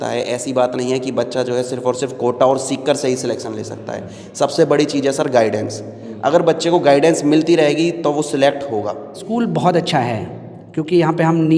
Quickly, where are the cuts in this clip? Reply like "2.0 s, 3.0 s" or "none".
9.2 s